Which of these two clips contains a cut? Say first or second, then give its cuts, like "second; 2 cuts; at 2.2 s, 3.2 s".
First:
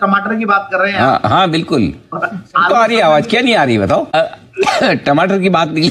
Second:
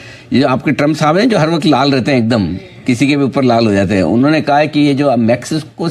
first; 1 cut; at 4.1 s